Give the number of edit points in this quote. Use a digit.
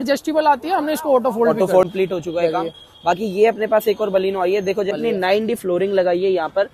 2